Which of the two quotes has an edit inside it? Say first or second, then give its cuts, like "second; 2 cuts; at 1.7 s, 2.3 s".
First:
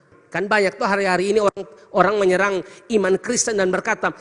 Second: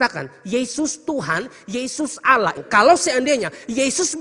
second; 1 cut; at 2.6 s